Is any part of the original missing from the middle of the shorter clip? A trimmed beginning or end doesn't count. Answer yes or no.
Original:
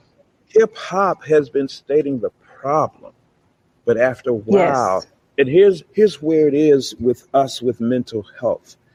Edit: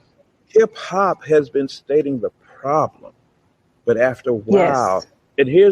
no